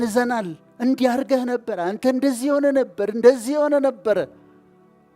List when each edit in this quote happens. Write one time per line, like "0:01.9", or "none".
none